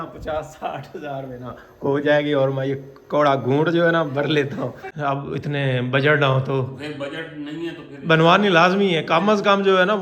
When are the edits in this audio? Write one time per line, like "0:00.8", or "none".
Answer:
0:04.8